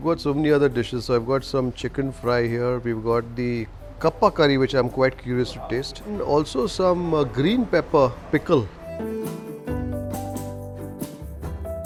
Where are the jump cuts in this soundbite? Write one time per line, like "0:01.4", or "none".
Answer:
none